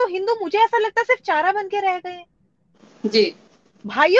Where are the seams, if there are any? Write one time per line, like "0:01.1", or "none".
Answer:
none

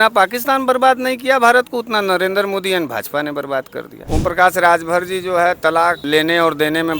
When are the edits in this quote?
0:03.9
0:06.0

